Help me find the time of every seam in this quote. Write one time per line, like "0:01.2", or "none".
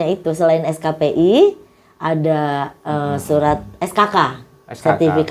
none